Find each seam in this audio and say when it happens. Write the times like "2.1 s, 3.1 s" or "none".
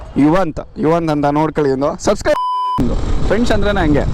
2.4 s